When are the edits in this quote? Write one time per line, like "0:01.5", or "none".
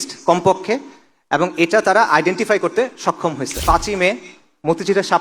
0:03.6